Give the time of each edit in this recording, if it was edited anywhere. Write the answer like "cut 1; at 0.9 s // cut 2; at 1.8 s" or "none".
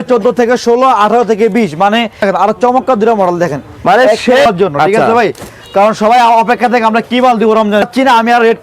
cut 1; at 2.2 s // cut 2; at 4.5 s // cut 3; at 7.9 s